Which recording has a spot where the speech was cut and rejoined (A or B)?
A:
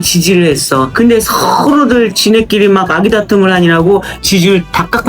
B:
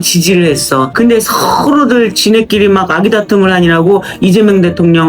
A